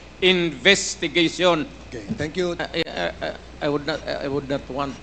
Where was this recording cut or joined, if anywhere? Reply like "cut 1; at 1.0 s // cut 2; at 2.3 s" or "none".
cut 1; at 2.6 s